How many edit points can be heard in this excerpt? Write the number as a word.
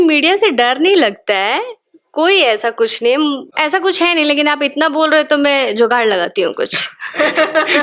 one